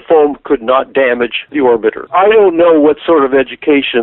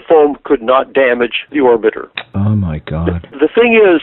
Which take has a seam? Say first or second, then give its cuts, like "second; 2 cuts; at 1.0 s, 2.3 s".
first; 1 cut; at 2.0 s